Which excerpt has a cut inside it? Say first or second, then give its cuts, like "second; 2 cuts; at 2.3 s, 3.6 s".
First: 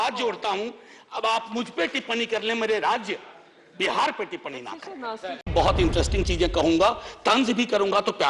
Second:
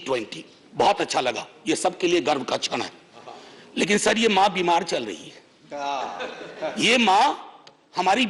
first; 1 cut; at 5.5 s